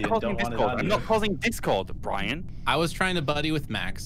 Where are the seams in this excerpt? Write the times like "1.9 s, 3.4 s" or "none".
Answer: 2.5 s